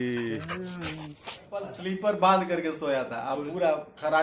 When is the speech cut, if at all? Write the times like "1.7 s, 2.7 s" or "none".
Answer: 1.7 s